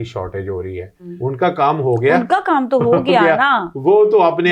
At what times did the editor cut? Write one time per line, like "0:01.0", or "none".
0:01.1